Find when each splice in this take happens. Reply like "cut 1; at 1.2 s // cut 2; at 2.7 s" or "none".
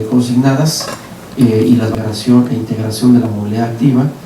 cut 1; at 1.9 s